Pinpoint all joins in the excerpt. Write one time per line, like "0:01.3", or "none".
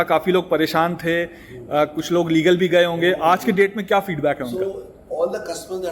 none